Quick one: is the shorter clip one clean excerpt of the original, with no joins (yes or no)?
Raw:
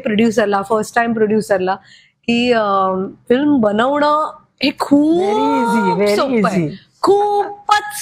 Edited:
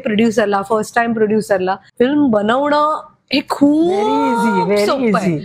no